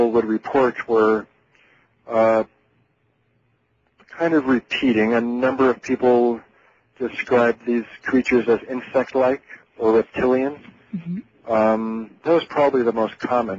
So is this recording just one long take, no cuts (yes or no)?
no